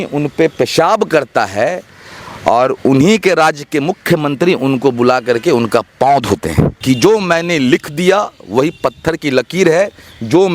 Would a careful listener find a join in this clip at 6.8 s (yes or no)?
yes